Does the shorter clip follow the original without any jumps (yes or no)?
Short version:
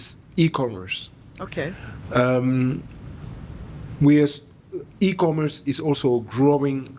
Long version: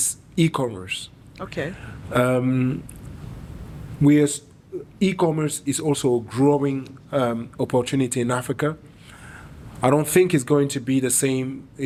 yes